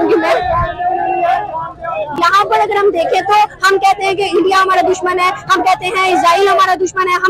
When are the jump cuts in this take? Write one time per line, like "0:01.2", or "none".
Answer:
none